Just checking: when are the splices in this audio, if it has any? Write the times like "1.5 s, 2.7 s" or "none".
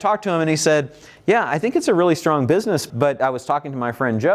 2.9 s